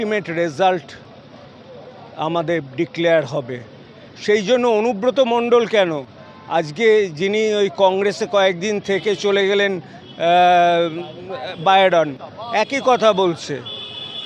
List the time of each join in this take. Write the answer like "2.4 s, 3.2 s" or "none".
none